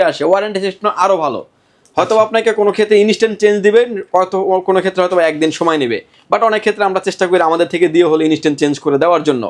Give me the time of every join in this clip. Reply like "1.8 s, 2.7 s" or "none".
none